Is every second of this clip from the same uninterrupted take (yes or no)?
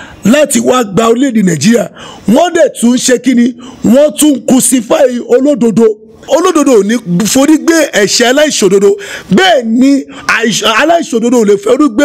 no